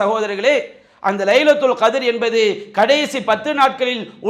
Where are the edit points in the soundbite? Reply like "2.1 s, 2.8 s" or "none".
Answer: none